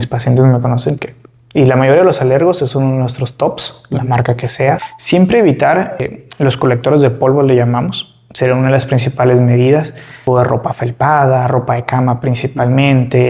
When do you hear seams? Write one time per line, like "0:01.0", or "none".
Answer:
0:04.9
0:06.1
0:10.2